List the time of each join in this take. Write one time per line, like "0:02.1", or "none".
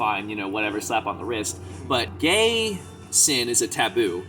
0:02.1